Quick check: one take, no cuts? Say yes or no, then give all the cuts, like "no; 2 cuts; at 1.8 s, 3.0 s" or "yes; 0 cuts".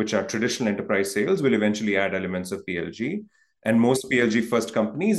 yes; 0 cuts